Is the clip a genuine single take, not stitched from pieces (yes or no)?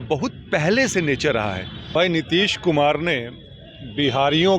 no